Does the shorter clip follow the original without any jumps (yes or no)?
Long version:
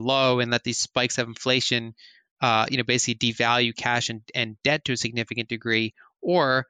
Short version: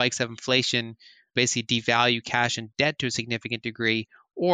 no